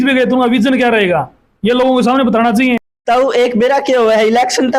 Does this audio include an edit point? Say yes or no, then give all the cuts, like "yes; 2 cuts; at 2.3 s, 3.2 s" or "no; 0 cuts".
yes; 1 cut; at 2.9 s